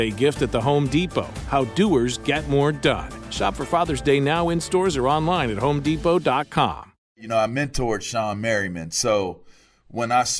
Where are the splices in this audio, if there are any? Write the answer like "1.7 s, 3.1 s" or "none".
7.2 s